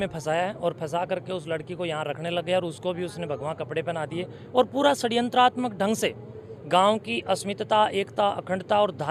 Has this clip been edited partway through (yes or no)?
no